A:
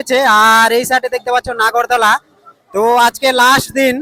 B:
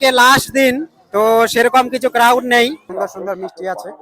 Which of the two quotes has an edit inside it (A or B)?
B